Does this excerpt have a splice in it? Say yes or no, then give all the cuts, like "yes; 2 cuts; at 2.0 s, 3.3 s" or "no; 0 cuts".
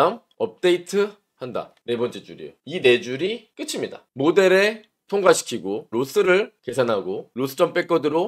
yes; 2 cuts; at 5.9 s, 7.3 s